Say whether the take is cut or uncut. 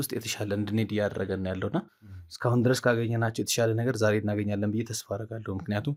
uncut